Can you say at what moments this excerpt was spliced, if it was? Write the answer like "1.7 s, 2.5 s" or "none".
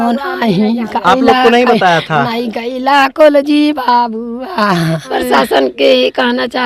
5.1 s